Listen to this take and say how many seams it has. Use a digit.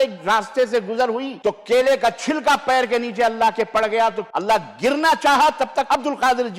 3